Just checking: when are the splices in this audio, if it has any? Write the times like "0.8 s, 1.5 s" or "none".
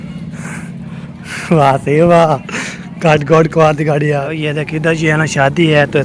none